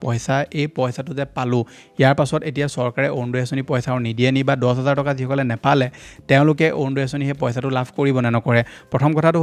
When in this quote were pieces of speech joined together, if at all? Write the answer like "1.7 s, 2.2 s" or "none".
none